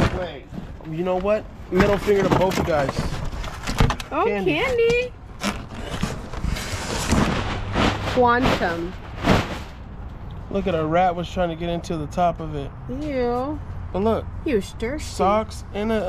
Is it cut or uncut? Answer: uncut